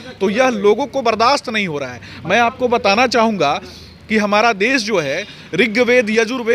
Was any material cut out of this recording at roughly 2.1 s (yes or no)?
no